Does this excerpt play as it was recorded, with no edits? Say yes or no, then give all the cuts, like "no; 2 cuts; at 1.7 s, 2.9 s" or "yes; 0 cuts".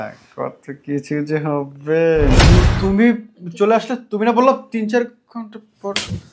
no; 1 cut; at 2.4 s